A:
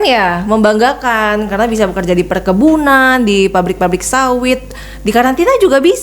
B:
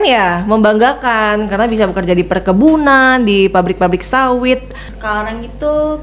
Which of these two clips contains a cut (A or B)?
B